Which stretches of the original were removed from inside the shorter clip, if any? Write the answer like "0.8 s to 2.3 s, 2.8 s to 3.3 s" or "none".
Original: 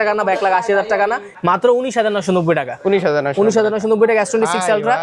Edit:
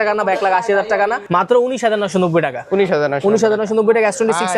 1.2 s to 1.3 s

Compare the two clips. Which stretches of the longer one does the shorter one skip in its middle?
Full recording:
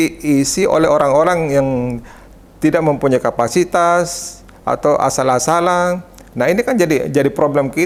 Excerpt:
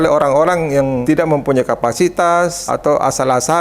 1.8 s to 2.6 s, 4.2 s to 4.6 s

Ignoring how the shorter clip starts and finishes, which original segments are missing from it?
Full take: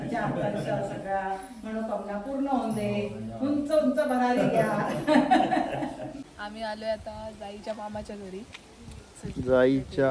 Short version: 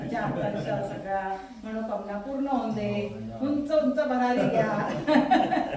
none

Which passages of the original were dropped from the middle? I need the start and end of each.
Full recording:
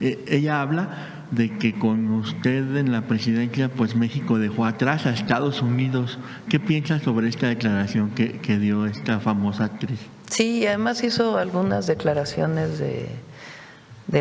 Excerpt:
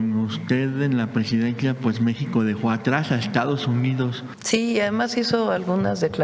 6.2 s to 10.2 s

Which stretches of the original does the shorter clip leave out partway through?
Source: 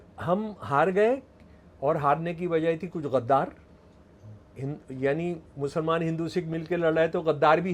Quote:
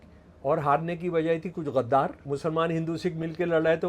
3.6 s to 5.5 s

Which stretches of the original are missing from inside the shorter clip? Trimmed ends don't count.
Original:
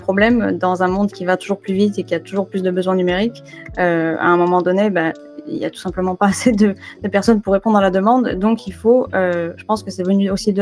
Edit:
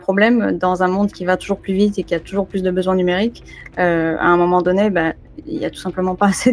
none

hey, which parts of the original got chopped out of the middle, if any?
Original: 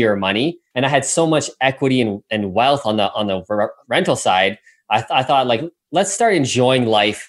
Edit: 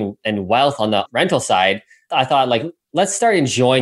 3.1 s to 3.8 s, 4.8 s to 5.1 s

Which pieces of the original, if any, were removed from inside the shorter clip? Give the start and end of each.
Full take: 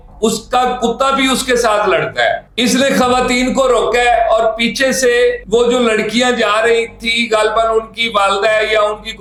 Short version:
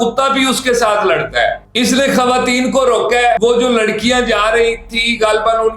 4.2 s to 5.5 s

